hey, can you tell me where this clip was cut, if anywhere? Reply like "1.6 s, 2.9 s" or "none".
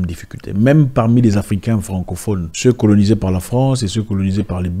2.5 s